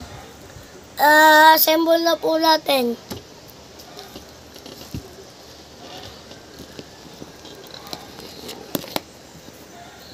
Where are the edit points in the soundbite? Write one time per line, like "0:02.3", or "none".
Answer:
none